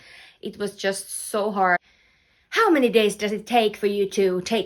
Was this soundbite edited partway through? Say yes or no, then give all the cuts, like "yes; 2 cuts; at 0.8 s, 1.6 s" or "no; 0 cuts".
yes; 1 cut; at 1.8 s